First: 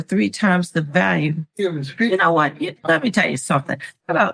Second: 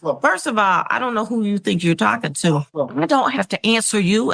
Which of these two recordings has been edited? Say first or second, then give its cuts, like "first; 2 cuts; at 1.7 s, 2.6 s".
second; 1 cut; at 2.7 s